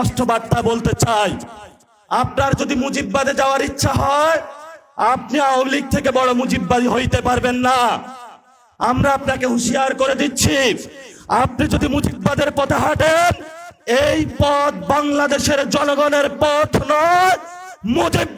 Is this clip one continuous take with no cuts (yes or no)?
yes